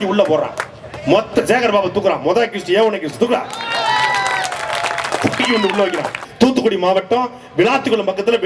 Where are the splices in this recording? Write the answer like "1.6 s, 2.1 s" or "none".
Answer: 6.2 s